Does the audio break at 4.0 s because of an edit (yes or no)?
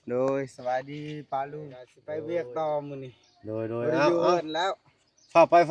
no